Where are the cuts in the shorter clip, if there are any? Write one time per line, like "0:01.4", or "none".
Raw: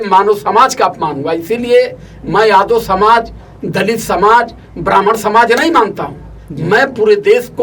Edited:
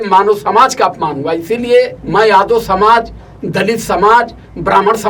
0:02.0